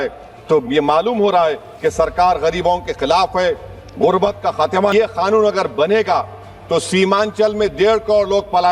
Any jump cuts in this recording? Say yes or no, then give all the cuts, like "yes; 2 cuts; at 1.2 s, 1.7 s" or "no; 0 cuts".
yes; 1 cut; at 4.9 s